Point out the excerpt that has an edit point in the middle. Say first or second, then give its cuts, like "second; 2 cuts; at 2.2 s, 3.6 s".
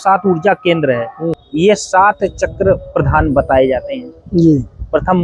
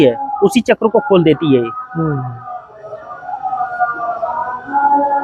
first; 1 cut; at 1.4 s